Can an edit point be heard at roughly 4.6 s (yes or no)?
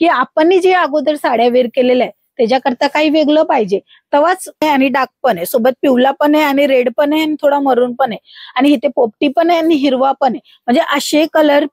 yes